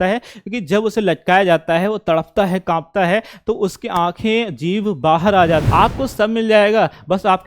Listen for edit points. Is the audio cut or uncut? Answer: cut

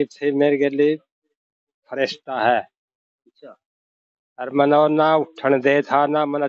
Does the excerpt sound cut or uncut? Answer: uncut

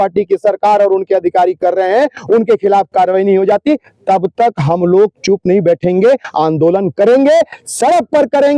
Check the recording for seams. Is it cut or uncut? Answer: uncut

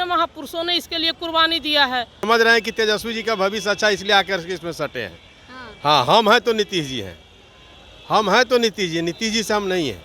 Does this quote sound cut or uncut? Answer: cut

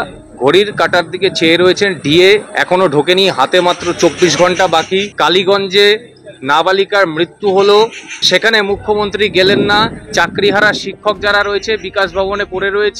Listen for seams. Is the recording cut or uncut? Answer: cut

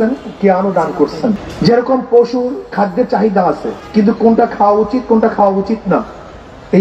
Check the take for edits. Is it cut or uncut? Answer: cut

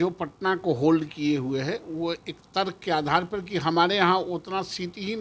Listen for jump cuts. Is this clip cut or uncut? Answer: uncut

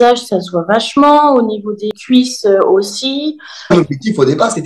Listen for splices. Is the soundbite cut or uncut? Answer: cut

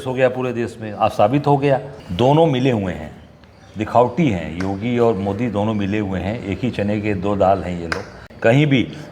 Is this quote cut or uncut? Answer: cut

